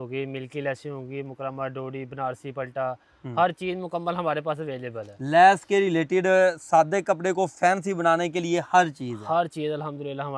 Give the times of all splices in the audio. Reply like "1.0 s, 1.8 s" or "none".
none